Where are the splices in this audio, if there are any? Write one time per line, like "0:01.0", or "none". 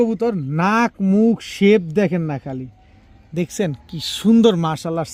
none